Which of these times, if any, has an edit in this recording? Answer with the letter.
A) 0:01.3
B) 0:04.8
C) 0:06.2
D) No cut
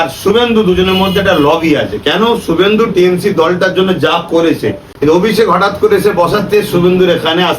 B